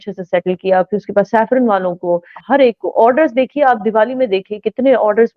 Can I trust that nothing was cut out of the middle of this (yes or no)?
no